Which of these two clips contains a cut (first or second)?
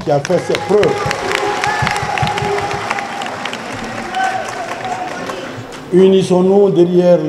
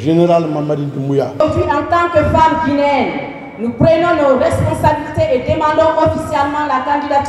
second